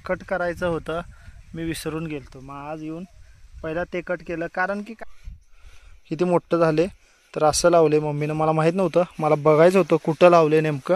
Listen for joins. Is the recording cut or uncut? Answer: cut